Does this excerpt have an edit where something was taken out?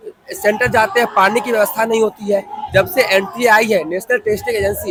no; 0 cuts

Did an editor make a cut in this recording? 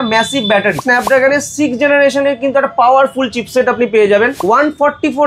yes; 2 cuts; at 0.8 s, 4.4 s

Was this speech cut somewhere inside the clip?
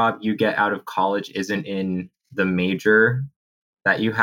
no; 0 cuts

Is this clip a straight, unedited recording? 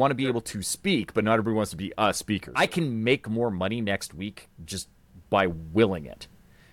no; 1 cut; at 2.5 s

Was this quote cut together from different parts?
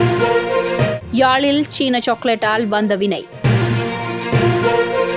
yes; 1 cut; at 1.0 s

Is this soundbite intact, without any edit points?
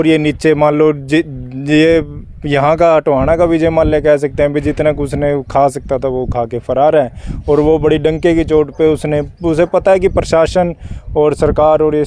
yes; 0 cuts

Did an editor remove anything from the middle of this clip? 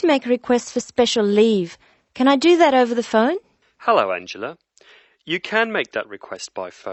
no; 0 cuts

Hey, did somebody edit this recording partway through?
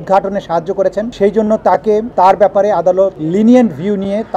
yes; 3 cuts; at 1.1 s, 2.1 s, 3.2 s

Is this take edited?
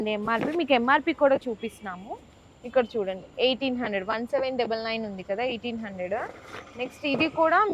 no; 0 cuts

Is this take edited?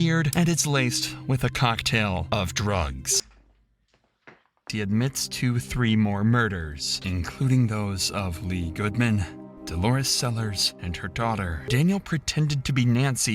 yes; 2 cuts; at 4.6 s, 11.6 s

